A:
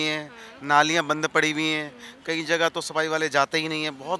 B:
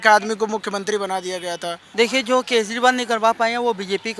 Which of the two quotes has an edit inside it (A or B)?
B